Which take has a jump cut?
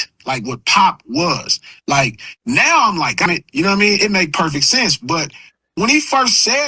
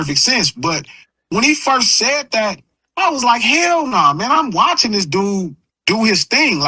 first; 1 cut; at 3.2 s

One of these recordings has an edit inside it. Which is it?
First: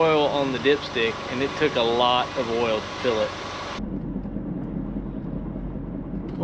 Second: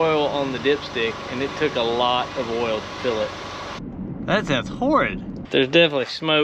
second; 2 cuts; at 3.8 s, 5.3 s

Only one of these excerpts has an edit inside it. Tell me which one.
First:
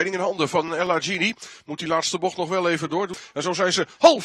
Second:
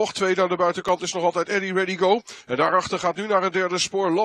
first; 1 cut; at 3.2 s

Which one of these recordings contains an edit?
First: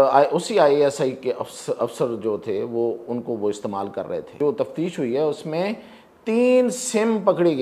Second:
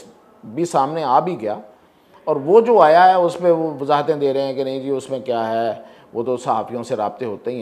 first; 1 cut; at 4.3 s

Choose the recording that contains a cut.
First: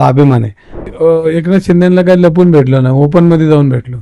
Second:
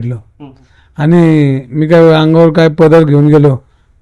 first; 1 cut; at 0.9 s

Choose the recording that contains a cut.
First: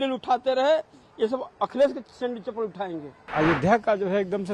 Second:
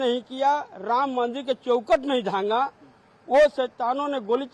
first; 1 cut; at 3.3 s

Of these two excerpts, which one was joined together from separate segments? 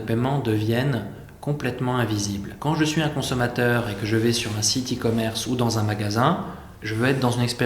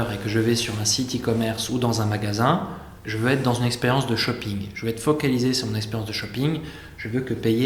first; 1 cut; at 2.5 s

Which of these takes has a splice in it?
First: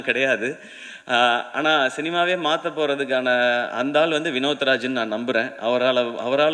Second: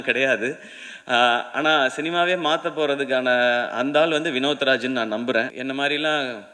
second; 1 cut; at 5.5 s

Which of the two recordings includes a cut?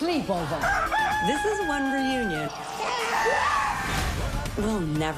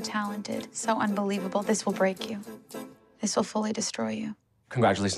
first; 1 cut; at 2.5 s

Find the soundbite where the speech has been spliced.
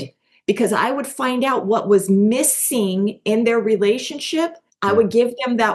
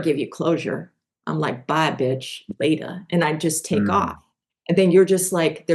first; 1 cut; at 4.7 s

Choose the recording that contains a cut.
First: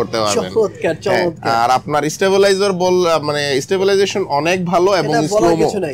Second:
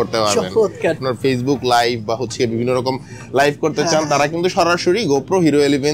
second; 1 cut; at 1.0 s

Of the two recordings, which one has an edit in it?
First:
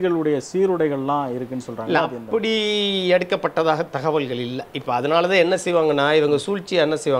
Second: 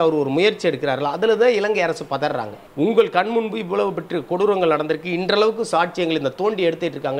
second; 1 cut; at 2.6 s

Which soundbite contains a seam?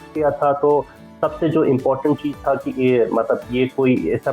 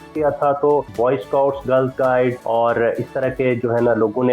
second; 2 cuts; at 0.9 s, 2.4 s

